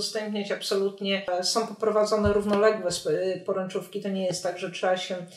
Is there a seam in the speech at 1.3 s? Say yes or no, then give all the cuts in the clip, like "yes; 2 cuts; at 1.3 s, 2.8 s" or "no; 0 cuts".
yes; 1 cut; at 1.3 s